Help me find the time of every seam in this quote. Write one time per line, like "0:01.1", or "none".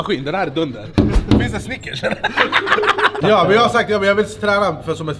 0:03.2